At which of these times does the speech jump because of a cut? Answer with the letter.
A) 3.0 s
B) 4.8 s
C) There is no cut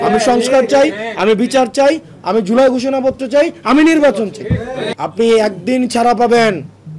B